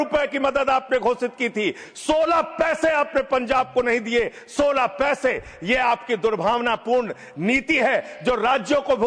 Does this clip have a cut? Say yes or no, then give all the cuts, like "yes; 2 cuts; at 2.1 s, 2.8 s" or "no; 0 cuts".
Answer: no; 0 cuts